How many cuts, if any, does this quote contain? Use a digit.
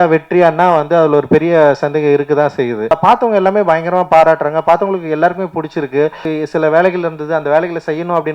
2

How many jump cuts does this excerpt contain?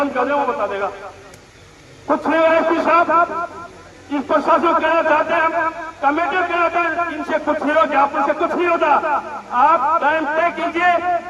0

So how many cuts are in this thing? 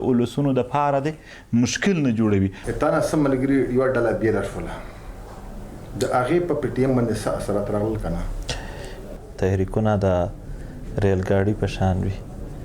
2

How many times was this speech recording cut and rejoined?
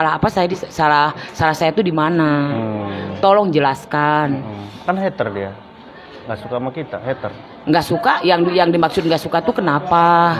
0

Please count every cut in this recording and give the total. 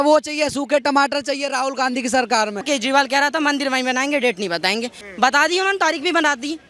2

